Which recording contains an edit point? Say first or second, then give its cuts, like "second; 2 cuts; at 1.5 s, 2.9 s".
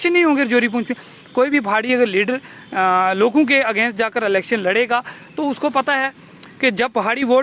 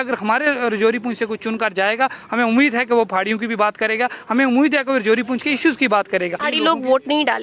second; 1 cut; at 6.4 s